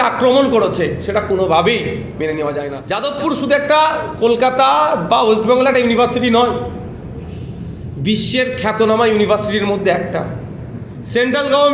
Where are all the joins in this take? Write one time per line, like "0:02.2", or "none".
0:02.8